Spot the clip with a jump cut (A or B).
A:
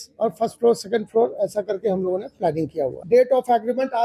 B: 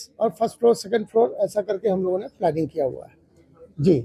A